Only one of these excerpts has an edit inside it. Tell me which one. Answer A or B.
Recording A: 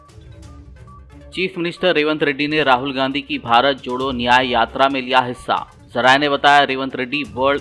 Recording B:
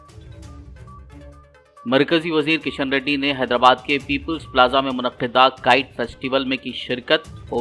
A